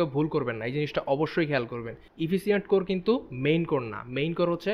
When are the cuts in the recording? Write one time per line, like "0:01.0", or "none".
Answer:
none